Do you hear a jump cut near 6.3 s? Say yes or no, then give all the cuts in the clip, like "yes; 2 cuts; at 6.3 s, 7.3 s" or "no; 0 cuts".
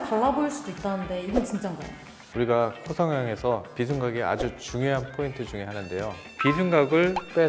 yes; 1 cut; at 6.3 s